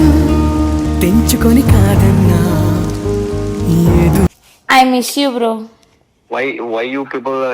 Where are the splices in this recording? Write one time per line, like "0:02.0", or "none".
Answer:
0:04.4